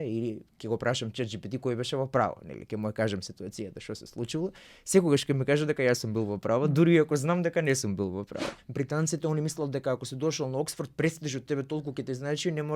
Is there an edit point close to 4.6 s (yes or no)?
no